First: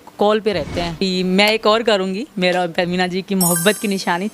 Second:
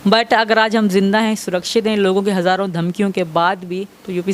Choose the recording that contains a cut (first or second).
first